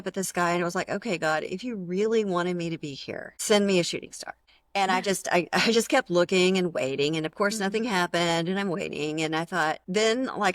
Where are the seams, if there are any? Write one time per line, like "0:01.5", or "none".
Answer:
none